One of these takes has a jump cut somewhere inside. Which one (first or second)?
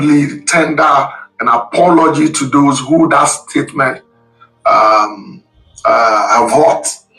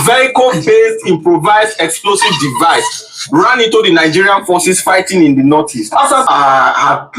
second